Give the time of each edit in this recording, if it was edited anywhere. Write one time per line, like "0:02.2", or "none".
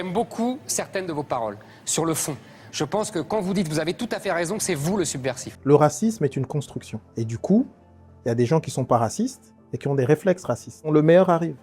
0:05.5
0:10.8